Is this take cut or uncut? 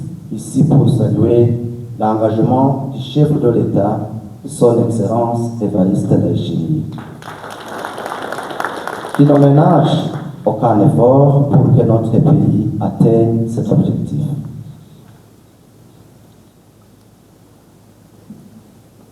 uncut